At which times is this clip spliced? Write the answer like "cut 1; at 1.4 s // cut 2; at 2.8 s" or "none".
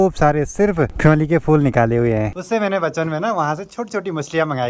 cut 1; at 0.9 s // cut 2; at 2.3 s